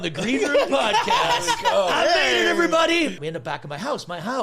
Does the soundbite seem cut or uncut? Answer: cut